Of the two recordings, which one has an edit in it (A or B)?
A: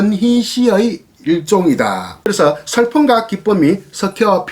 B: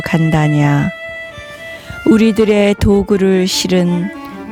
A